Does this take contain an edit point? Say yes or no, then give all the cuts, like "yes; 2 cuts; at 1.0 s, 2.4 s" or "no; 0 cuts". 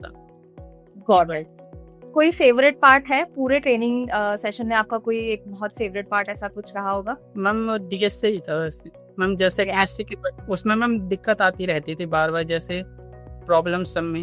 no; 0 cuts